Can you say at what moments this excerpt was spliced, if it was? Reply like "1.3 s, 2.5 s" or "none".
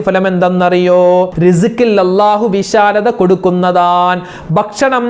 1.3 s